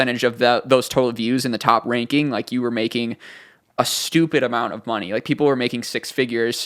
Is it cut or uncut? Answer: uncut